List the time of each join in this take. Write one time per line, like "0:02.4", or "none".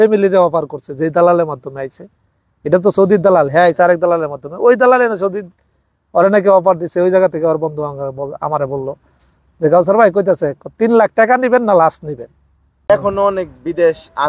0:12.9

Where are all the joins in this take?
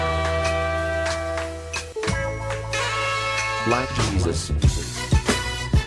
0:00.9

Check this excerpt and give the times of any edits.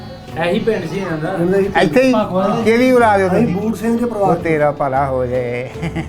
none

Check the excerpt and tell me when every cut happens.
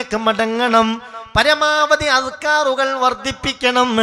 none

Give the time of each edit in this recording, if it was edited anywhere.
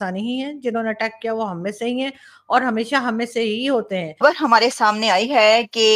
0:04.1

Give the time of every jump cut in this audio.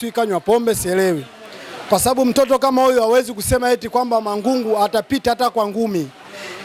none

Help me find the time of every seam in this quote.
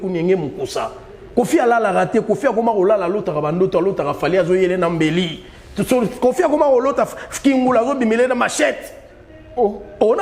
none

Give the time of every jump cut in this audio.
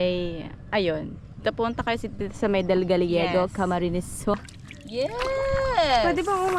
0:04.3

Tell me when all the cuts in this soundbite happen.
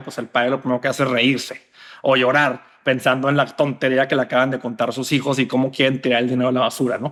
none

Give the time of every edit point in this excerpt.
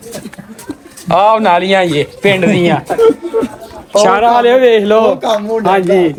none

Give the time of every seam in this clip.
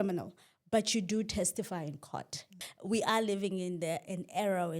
0:02.5

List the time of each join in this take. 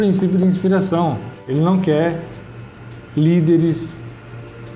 0:01.3

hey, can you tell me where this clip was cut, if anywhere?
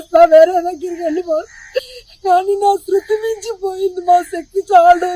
0:02.0

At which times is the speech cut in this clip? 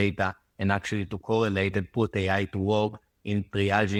none

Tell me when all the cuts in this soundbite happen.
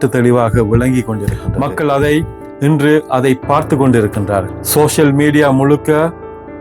0:01.4
0:04.6

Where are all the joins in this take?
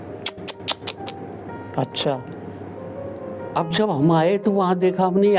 none

